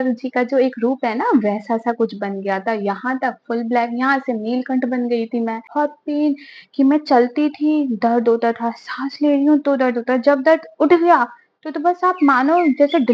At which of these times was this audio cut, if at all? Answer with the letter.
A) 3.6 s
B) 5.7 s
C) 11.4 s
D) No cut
B